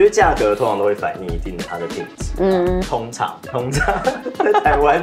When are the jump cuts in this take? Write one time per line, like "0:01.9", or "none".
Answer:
none